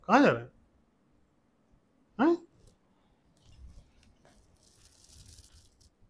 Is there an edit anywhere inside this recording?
no; 0 cuts

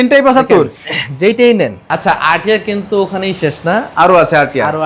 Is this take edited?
yes; 1 cut; at 1.8 s

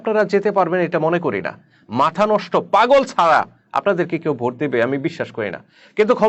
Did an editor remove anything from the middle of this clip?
no; 0 cuts

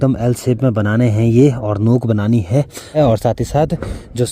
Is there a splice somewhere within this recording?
yes; 1 cut; at 3.0 s

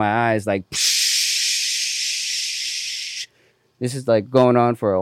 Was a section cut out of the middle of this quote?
no; 0 cuts

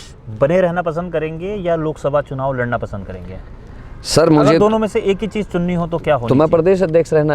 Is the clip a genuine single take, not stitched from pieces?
yes; 0 cuts

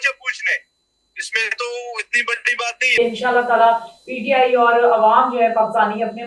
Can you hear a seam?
yes; 1 cut; at 2.9 s

